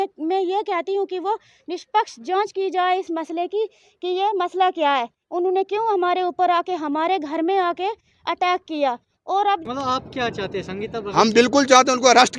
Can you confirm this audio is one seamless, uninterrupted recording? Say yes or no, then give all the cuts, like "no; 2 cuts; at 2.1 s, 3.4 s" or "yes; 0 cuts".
no; 1 cut; at 9.6 s